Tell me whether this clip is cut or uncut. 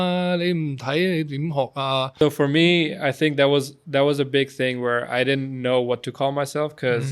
cut